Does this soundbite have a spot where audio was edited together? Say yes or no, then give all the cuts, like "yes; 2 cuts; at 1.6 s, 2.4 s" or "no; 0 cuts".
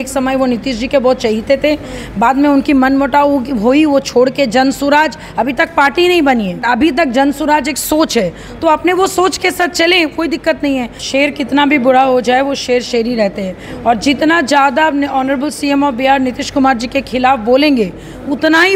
yes; 2 cuts; at 6.6 s, 11.0 s